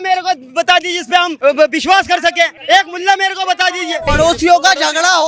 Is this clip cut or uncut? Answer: cut